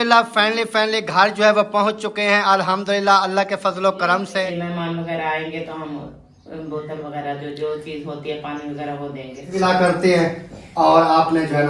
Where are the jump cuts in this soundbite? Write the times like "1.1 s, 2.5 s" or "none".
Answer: 4.5 s, 9.5 s